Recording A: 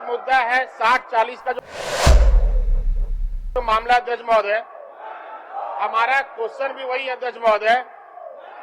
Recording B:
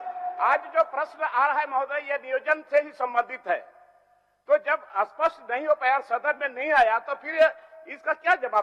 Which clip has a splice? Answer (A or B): A